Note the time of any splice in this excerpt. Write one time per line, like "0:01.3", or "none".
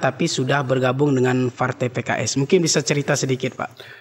none